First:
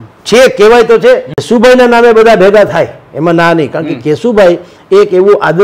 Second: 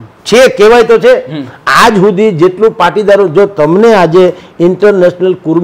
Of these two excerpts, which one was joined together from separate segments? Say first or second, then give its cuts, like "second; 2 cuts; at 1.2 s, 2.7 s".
first; 1 cut; at 1.4 s